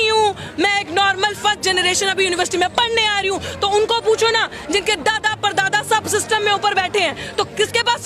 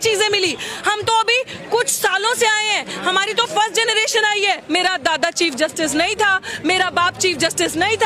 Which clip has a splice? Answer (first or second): second